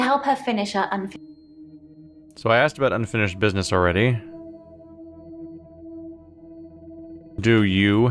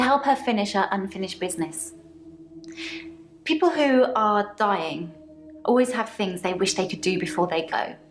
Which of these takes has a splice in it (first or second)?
second